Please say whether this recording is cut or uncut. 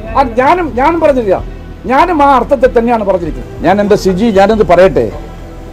cut